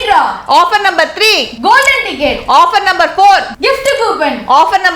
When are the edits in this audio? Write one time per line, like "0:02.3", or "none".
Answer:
0:01.5
0:03.5